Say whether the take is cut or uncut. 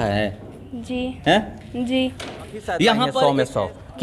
cut